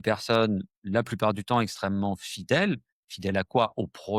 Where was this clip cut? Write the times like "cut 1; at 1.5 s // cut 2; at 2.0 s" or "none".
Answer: none